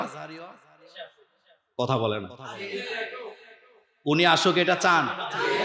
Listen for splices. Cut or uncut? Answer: uncut